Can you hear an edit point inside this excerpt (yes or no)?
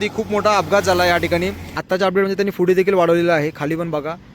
yes